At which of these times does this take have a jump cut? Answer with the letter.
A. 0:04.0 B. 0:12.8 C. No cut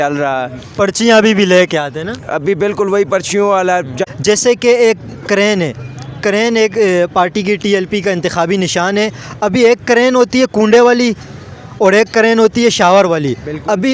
A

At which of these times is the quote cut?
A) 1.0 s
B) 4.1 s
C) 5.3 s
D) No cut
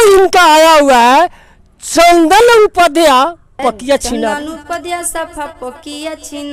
D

